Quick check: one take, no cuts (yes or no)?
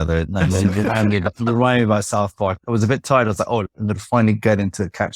no